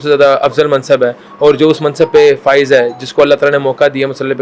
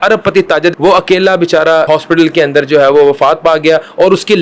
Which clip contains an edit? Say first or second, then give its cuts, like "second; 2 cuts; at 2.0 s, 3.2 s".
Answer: second; 2 cuts; at 0.8 s, 1.9 s